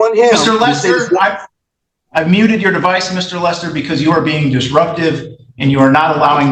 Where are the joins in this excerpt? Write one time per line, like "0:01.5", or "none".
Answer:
none

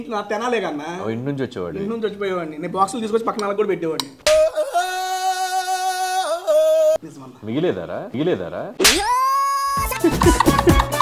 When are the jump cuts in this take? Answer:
none

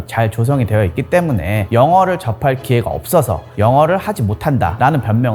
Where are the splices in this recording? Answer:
none

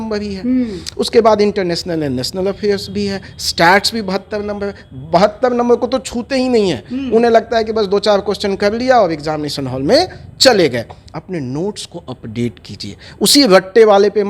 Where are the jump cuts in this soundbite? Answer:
0:11.2

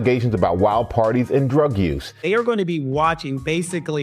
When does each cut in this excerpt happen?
0:02.1

